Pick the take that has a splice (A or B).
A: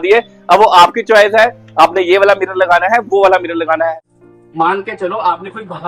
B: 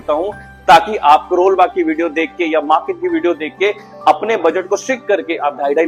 A